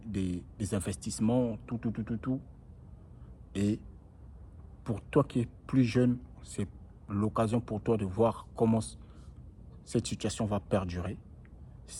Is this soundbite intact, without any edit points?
yes; 0 cuts

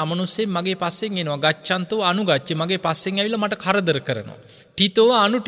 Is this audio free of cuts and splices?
yes; 0 cuts

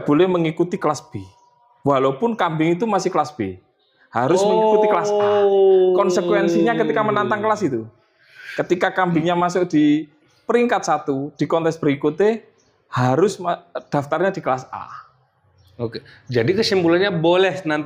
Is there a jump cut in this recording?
no; 0 cuts

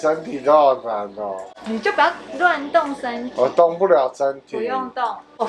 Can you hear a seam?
no; 0 cuts

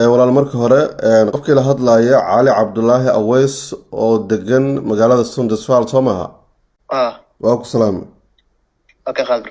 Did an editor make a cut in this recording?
yes; 1 cut; at 1.4 s

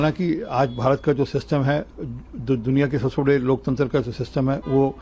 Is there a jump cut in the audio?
no; 0 cuts

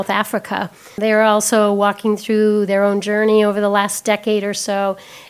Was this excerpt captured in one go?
no; 1 cut; at 1.0 s

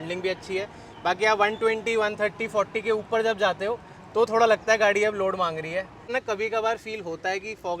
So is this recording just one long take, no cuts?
no; 1 cut; at 6.1 s

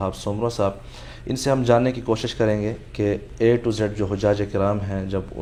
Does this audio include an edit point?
no; 0 cuts

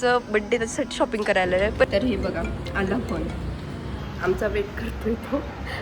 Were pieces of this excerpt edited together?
yes; 1 cut; at 1.9 s

